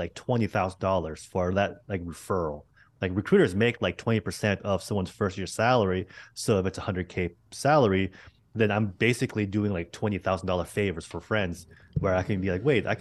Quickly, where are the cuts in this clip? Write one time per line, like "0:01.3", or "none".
none